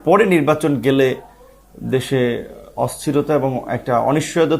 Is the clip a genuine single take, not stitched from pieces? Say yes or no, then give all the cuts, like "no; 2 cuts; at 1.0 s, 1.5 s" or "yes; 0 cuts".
yes; 0 cuts